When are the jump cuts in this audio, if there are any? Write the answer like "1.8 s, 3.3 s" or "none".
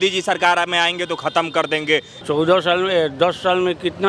2.1 s